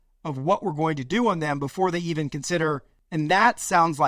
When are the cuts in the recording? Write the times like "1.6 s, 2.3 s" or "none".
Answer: 2.9 s